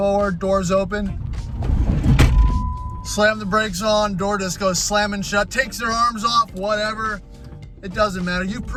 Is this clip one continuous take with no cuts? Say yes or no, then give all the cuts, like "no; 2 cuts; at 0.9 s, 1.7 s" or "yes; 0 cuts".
yes; 0 cuts